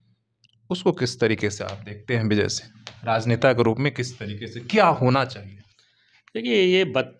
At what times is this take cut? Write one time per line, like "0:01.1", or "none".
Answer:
none